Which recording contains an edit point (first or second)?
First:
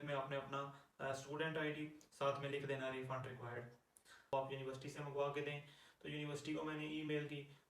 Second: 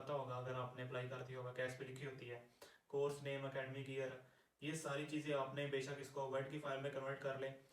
first